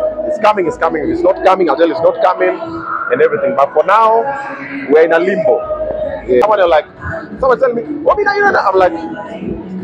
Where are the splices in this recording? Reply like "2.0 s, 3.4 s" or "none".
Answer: 6.4 s